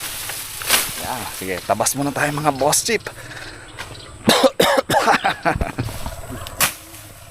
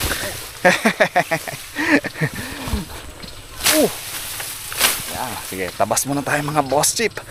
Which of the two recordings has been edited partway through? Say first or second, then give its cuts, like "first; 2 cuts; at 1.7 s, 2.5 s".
first; 1 cut; at 5.6 s